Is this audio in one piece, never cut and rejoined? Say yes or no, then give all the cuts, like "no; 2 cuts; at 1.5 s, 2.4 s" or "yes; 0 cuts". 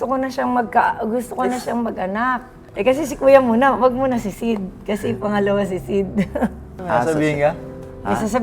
no; 2 cuts; at 2.5 s, 6.7 s